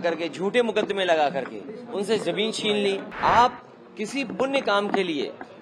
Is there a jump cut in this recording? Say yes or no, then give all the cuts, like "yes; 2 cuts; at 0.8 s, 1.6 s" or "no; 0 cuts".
yes; 1 cut; at 3.1 s